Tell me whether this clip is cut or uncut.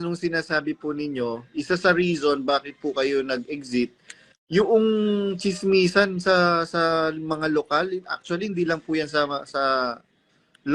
uncut